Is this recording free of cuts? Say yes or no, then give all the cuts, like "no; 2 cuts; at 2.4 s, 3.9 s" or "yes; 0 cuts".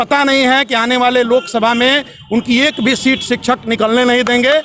yes; 0 cuts